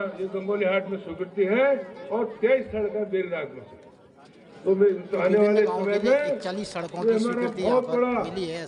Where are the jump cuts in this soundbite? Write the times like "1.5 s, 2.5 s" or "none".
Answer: none